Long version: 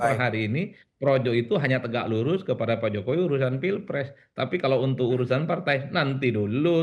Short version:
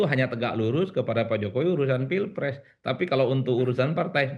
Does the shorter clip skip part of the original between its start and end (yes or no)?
no